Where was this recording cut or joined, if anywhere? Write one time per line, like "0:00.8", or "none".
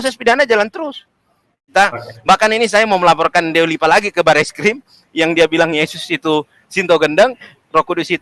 0:01.6